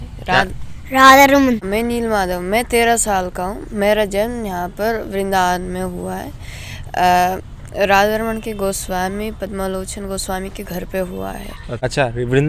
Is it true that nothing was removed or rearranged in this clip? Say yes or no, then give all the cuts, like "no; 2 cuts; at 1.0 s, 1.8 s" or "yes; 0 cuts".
yes; 0 cuts